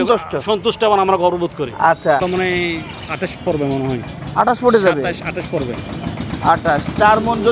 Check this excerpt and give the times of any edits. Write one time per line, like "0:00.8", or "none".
0:02.2